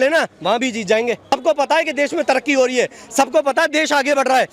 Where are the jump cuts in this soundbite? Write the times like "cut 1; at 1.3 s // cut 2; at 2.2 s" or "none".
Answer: cut 1; at 1.2 s